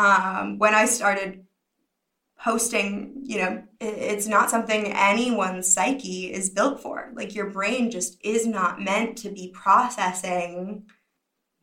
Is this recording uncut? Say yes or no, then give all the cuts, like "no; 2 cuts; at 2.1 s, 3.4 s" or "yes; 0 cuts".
no; 1 cut; at 3.7 s